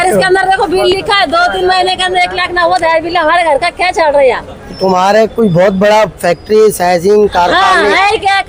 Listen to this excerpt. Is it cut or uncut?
uncut